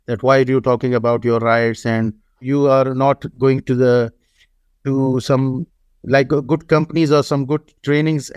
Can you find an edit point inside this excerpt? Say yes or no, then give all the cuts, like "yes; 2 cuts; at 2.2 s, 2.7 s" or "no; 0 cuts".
yes; 1 cut; at 2.4 s